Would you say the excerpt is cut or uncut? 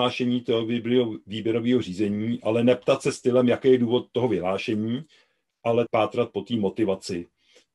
cut